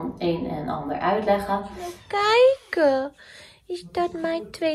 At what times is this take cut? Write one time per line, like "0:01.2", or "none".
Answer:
0:02.0